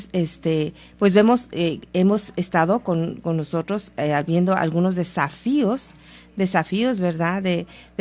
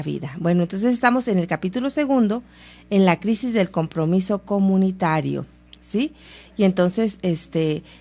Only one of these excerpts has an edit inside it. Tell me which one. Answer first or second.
second